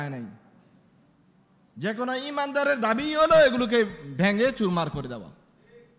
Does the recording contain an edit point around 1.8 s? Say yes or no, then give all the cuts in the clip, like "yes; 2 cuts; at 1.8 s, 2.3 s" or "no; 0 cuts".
no; 0 cuts